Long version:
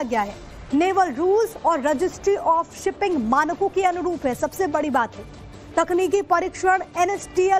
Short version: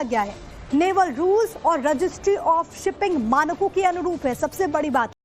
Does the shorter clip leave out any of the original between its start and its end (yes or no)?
no